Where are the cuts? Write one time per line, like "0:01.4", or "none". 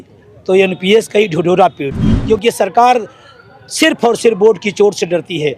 0:02.1